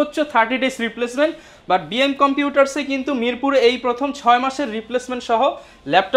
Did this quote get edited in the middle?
no; 0 cuts

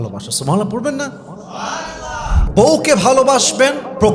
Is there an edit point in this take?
yes; 1 cut; at 2.4 s

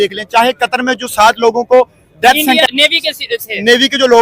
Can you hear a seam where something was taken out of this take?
yes; 1 cut; at 2.6 s

